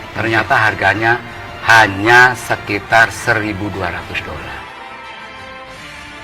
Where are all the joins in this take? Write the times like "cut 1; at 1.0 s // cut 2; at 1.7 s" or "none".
cut 1; at 4.7 s